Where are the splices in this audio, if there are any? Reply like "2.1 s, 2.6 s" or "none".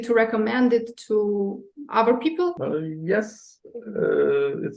2.6 s

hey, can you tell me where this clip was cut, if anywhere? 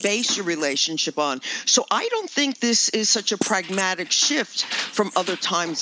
none

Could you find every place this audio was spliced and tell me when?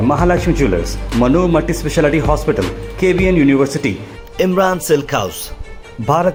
none

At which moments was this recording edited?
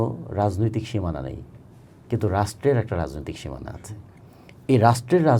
none

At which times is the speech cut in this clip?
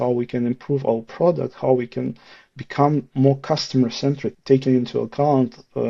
4.3 s

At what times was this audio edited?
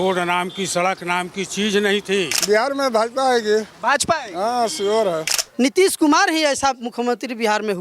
2.4 s, 5.4 s

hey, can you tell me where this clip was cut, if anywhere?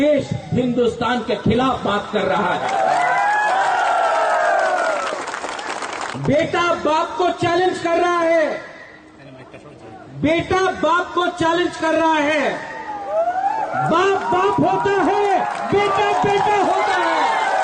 6.2 s

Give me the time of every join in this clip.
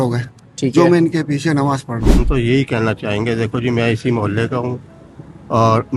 2.2 s

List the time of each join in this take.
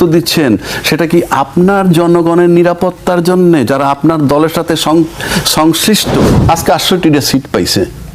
6.5 s

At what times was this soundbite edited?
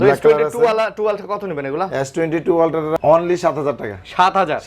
3.0 s

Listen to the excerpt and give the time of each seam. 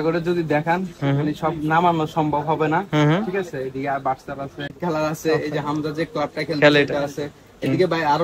4.8 s

